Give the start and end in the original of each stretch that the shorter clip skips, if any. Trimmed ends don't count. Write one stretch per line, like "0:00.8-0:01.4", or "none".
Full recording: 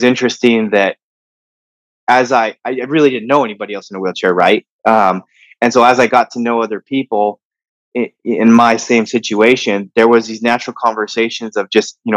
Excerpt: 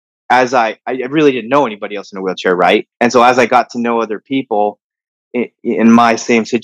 0:04.7-0:05.5